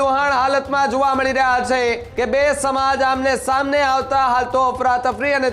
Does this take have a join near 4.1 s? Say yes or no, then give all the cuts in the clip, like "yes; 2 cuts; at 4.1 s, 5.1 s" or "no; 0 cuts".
no; 1 cut; at 2.1 s